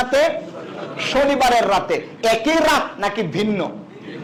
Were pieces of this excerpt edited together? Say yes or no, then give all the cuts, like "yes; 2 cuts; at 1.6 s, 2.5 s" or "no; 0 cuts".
no; 0 cuts